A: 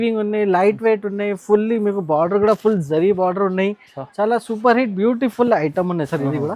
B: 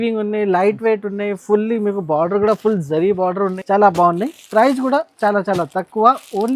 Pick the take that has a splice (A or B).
B